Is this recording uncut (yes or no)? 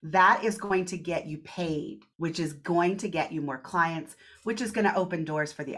no